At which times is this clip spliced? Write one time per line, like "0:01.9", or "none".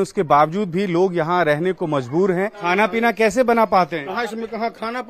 0:02.6